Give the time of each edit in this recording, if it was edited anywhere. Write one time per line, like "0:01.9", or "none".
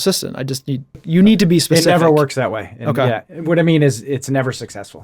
0:01.0